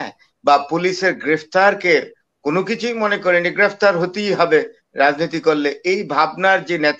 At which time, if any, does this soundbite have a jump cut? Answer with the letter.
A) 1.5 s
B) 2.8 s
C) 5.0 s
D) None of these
D